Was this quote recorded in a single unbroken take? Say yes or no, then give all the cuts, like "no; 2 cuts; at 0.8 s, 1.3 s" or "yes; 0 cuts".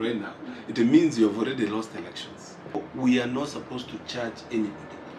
no; 1 cut; at 2.9 s